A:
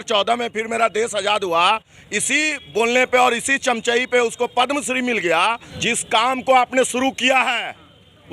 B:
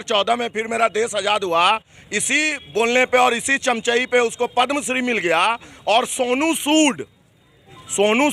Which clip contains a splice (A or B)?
A